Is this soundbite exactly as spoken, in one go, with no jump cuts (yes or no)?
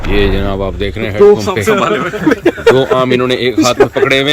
yes